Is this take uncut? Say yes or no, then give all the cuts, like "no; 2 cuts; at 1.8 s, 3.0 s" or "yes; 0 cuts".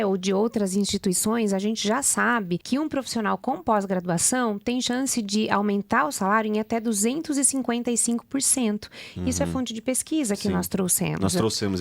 no; 1 cut; at 2.6 s